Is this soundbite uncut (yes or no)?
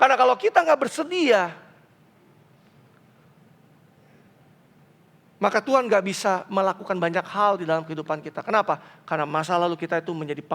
yes